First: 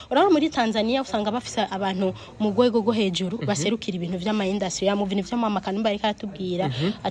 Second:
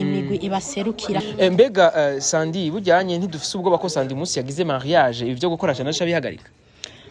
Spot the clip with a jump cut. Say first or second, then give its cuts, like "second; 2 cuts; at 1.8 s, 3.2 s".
second; 1 cut; at 1.2 s